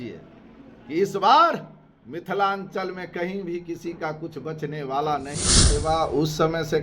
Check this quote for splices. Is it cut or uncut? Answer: cut